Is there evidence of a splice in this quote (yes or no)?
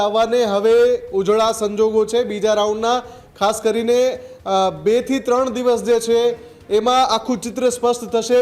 no